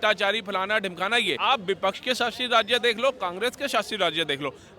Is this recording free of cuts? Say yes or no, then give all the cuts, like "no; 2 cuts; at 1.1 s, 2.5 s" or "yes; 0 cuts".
no; 1 cut; at 1.4 s